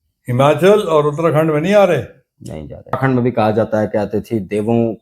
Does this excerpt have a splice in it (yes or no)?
yes